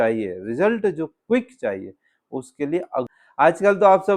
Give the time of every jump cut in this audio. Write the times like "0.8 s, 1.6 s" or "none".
3.1 s